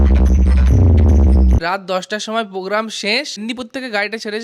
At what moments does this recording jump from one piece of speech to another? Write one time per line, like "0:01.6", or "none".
0:01.6
0:03.4